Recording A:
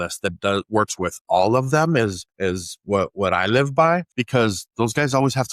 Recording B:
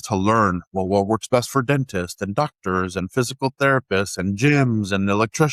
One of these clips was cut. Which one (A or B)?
A